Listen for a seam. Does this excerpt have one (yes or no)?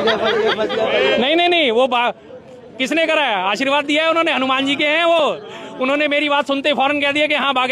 yes